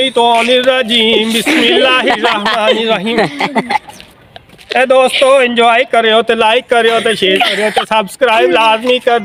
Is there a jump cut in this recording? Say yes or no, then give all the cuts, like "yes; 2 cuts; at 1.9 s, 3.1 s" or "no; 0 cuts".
no; 0 cuts